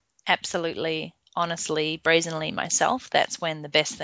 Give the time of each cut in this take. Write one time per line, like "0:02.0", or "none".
none